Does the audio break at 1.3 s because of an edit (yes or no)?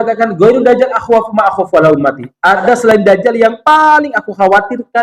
no